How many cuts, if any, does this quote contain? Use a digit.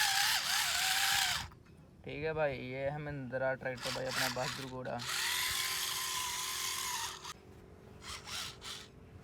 1